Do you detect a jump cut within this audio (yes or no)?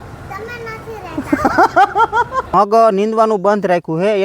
yes